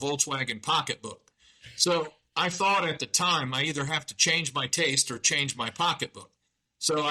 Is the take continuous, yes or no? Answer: yes